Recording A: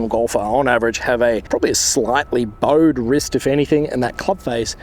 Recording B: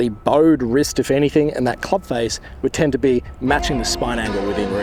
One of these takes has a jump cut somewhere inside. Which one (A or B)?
A